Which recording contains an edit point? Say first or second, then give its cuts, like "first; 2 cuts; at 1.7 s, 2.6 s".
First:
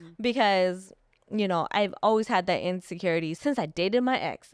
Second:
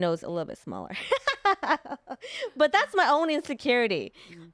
first; 1 cut; at 3.3 s